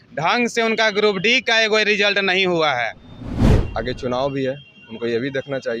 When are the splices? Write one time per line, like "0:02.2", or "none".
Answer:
0:03.5